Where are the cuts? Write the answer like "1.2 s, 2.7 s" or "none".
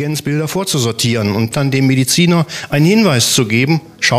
1.5 s